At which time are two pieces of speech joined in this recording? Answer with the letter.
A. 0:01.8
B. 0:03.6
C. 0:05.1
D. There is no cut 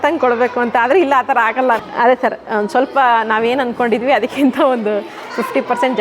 A